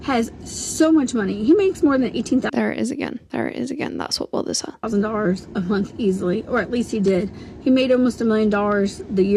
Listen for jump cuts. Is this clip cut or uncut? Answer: uncut